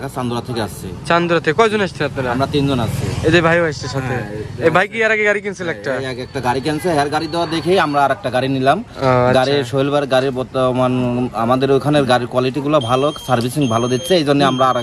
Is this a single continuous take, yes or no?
yes